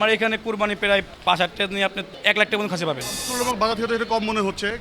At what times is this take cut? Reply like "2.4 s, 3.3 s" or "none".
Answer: 1.1 s, 2.1 s, 3.2 s